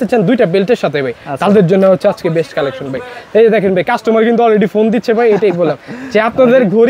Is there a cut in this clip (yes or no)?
no